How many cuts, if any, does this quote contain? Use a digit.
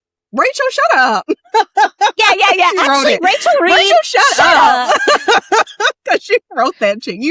1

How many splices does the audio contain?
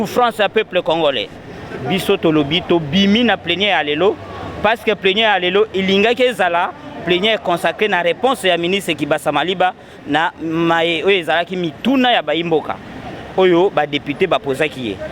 0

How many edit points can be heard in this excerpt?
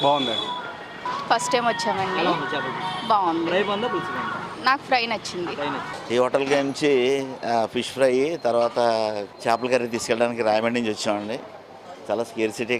3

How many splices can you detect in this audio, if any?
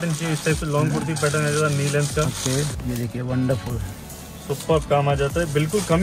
1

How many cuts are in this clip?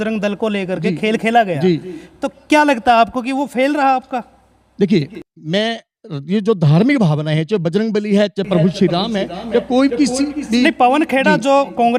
0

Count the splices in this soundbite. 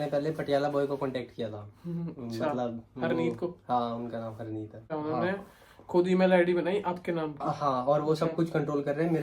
1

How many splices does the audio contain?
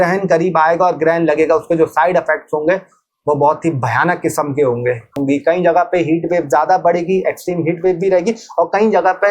1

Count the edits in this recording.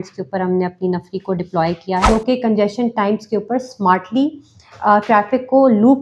1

